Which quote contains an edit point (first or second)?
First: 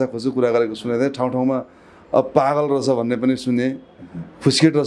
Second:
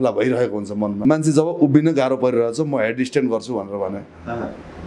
second